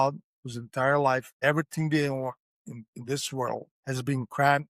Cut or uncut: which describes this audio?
cut